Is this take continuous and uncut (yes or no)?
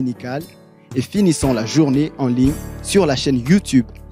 yes